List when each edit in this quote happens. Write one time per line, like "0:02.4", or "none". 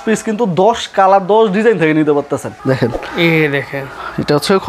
0:02.5